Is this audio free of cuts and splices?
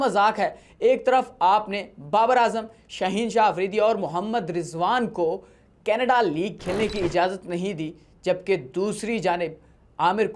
yes; 0 cuts

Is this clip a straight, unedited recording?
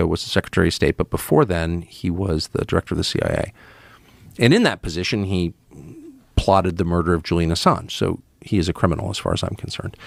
yes; 0 cuts

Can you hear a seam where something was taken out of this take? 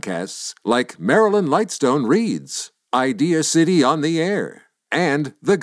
no; 0 cuts

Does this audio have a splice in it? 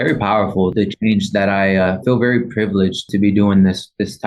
yes; 3 cuts; at 0.7 s, 2.0 s, 3.1 s

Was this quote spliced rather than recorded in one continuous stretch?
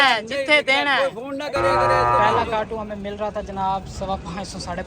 yes; 1 cut; at 1.7 s

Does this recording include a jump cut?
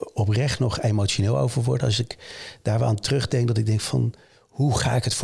no; 0 cuts

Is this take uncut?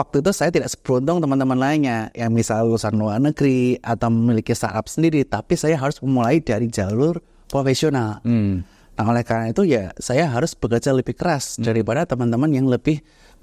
yes; 0 cuts

